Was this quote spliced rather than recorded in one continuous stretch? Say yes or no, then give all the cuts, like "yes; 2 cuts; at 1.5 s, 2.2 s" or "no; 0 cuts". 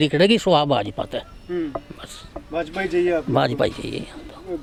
no; 0 cuts